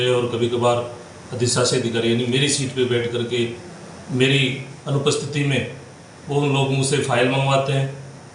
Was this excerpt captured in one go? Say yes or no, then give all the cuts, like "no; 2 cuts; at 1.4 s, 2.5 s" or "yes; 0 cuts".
yes; 0 cuts